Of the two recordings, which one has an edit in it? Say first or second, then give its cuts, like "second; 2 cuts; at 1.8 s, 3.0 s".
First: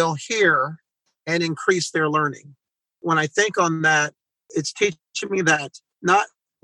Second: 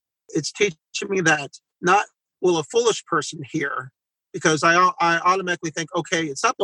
first; 1 cut; at 3.0 s